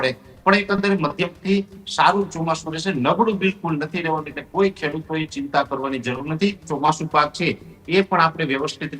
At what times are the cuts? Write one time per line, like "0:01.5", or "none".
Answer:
0:06.6